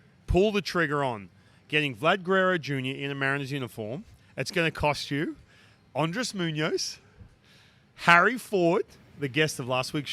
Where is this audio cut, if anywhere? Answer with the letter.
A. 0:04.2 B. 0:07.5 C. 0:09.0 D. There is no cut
D